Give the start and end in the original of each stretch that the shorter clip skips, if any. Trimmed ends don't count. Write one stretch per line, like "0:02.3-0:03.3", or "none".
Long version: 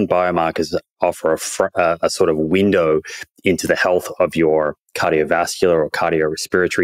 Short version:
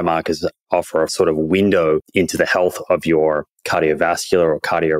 0:01.4-0:02.1
0:03.1-0:03.4